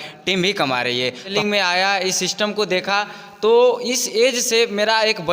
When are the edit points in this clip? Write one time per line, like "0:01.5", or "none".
0:01.3